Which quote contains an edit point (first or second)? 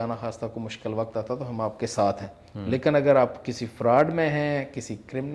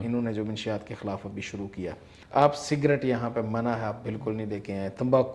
second